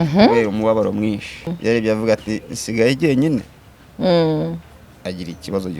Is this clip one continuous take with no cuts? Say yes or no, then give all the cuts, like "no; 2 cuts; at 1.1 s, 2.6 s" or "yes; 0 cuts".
no; 1 cut; at 1.5 s